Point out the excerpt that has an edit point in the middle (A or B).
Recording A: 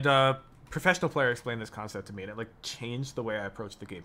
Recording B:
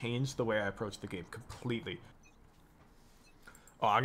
B